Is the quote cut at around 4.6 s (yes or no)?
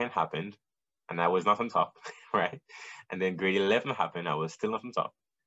no